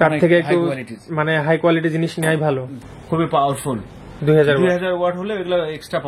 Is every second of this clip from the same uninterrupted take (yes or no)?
no